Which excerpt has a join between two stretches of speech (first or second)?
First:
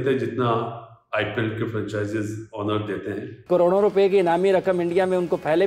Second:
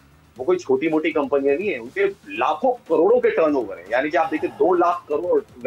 first